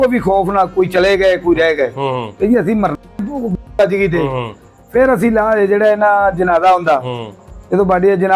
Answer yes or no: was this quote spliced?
no